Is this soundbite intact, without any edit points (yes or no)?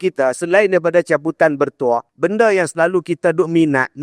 no